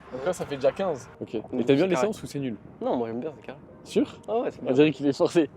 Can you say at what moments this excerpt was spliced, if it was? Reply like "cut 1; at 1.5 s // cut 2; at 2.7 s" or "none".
cut 1; at 1.1 s